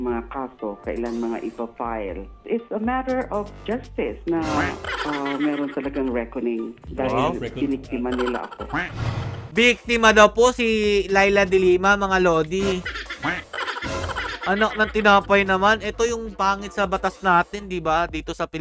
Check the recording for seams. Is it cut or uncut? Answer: uncut